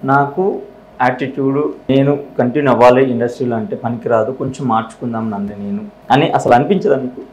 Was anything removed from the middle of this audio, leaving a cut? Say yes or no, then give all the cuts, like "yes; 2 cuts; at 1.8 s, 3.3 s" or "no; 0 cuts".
yes; 2 cuts; at 1.9 s, 5.9 s